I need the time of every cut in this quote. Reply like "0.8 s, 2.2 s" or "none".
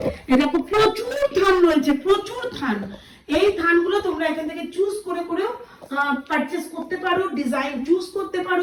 none